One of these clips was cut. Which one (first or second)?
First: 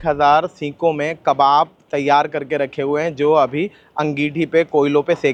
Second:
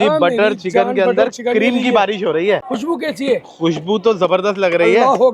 second